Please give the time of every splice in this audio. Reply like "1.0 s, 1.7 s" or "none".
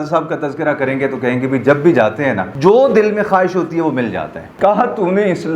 2.5 s, 4.4 s